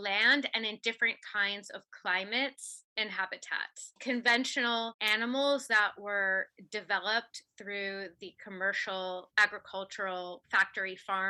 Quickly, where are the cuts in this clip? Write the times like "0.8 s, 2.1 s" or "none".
none